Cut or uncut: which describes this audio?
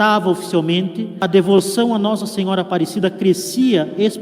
cut